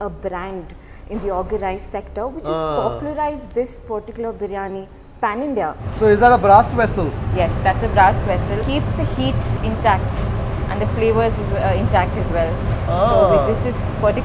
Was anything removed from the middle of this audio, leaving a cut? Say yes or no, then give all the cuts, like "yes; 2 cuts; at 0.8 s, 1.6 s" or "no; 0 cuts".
yes; 1 cut; at 5.8 s